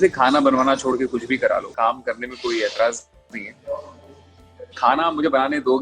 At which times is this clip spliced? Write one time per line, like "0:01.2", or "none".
0:01.7

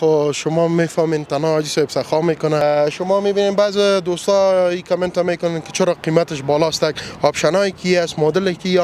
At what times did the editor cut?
0:02.6

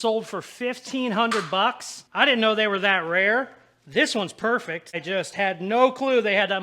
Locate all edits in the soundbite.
0:05.0

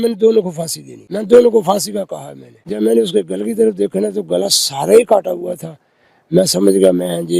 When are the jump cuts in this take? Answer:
0:01.2
0:02.8

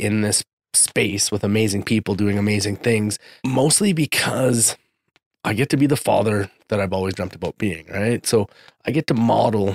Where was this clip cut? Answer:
0:03.3

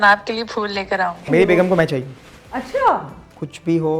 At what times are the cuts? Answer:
0:01.3

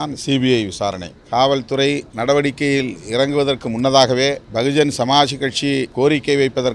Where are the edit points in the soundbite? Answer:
0:01.1
0:02.1
0:04.4
0:05.9

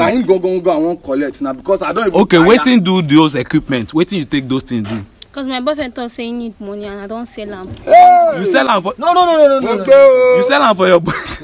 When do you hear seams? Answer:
none

